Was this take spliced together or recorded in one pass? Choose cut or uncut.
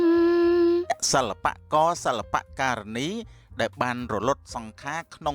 cut